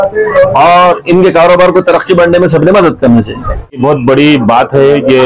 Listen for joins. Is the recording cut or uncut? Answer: cut